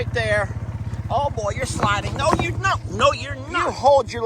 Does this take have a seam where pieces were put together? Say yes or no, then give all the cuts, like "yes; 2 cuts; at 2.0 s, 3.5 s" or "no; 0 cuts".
yes; 1 cut; at 3.4 s